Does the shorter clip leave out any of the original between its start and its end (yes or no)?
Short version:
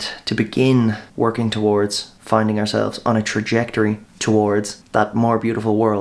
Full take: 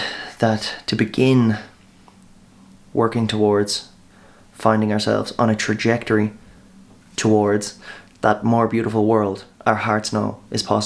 yes